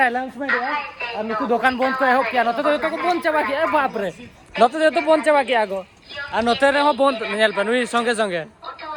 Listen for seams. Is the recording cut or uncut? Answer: uncut